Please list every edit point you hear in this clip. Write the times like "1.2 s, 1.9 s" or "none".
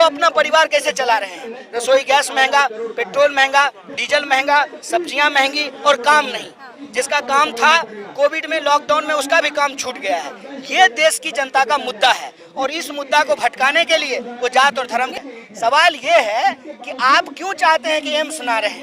15.2 s